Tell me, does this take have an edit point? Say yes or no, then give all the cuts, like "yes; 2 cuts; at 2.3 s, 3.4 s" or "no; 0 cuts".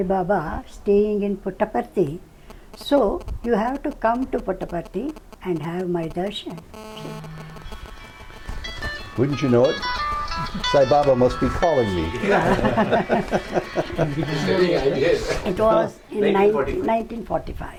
no; 0 cuts